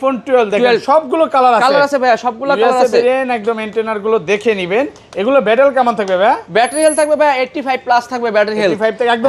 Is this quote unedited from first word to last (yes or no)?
yes